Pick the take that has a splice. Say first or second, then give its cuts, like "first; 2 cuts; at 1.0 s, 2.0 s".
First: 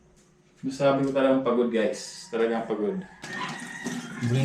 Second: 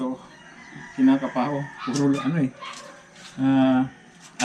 first; 1 cut; at 3.2 s